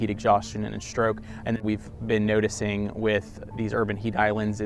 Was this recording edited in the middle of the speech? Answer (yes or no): yes